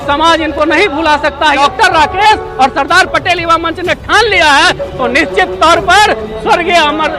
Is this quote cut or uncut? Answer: cut